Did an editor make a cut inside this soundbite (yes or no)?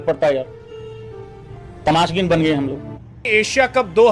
no